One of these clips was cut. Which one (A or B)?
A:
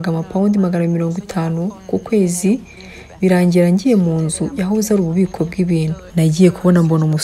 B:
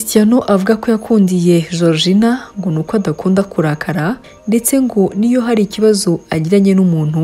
A